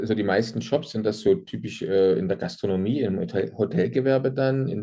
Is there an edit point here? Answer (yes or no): no